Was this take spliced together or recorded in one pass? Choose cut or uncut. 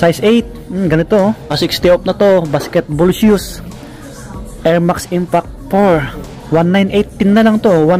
cut